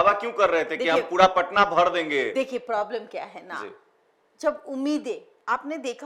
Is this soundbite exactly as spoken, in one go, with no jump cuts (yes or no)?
yes